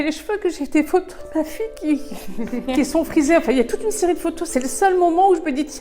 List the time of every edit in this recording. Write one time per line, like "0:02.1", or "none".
0:02.7